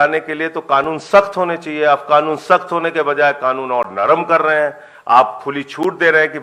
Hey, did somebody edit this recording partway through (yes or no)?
no